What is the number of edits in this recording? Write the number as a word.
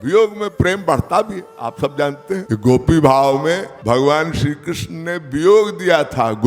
two